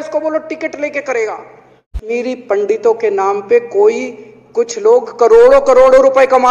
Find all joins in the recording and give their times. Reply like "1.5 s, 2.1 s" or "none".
2.0 s

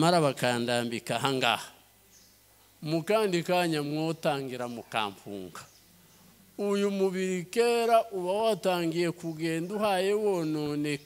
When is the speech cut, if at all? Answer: none

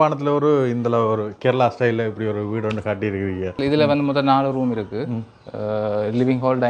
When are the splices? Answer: none

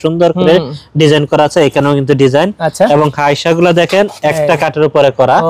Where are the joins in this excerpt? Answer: none

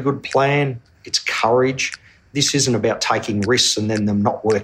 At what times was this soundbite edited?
2.1 s

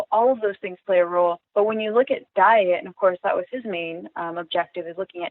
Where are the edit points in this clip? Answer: 1.4 s

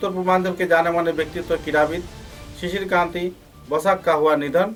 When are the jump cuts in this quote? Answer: none

